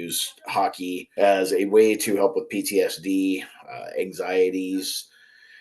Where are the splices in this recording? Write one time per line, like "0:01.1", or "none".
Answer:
0:01.1